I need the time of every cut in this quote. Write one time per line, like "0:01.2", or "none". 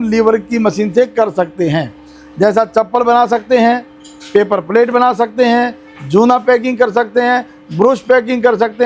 none